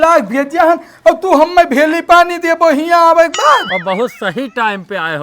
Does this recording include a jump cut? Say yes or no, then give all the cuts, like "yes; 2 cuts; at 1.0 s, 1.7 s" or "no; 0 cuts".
yes; 1 cut; at 3.7 s